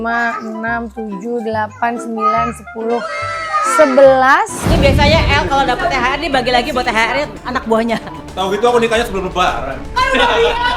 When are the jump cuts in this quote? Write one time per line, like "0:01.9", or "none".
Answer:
0:04.6
0:08.2